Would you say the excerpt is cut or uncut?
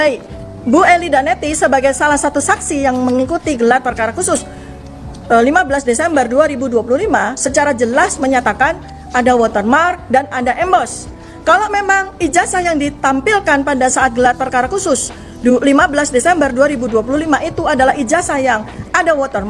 uncut